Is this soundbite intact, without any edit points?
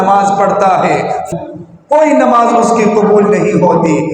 no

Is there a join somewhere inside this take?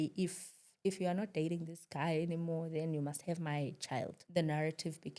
yes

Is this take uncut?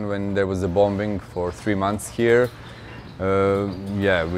yes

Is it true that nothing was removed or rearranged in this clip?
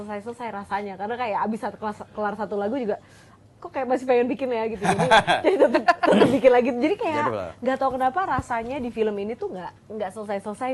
yes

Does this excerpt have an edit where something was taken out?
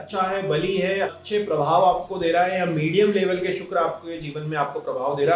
yes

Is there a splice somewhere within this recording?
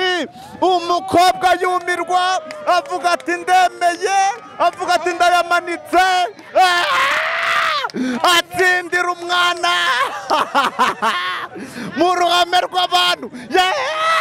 no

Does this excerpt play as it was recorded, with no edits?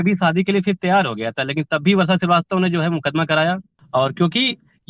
no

